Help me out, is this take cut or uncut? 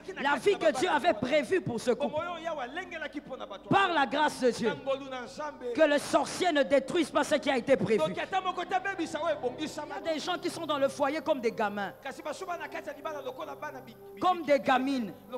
cut